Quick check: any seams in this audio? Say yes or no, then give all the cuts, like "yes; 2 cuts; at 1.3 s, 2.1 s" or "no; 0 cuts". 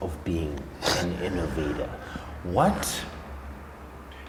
no; 0 cuts